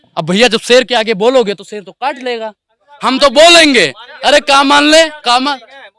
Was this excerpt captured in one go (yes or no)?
yes